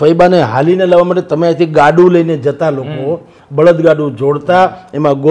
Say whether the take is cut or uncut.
uncut